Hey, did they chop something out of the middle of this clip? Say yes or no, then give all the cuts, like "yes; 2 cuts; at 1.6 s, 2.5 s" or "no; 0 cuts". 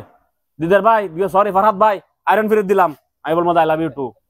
no; 0 cuts